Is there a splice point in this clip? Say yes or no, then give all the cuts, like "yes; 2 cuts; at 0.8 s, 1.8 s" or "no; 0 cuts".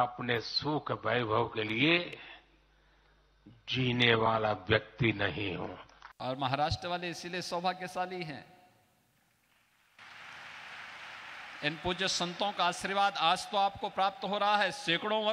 no; 0 cuts